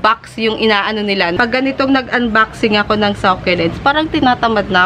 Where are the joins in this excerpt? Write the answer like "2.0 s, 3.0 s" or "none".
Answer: 1.4 s

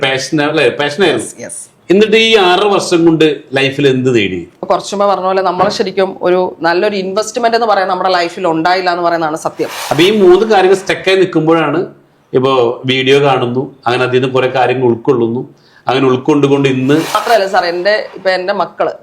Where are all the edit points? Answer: 4.6 s, 9.7 s, 17.2 s

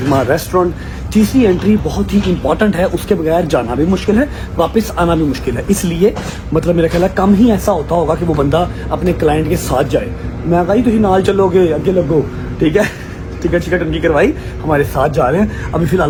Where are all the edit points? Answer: none

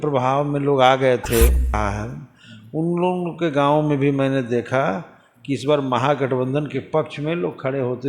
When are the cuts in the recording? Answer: 1.8 s

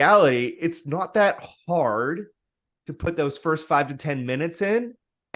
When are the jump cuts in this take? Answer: none

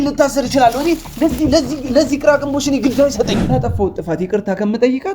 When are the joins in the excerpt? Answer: 3.5 s

